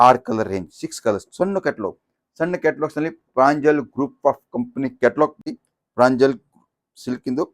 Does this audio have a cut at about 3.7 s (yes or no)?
no